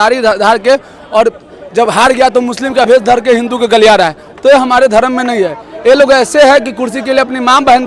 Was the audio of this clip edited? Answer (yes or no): no